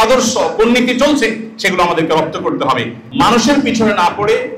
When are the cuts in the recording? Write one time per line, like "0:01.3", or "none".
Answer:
0:03.0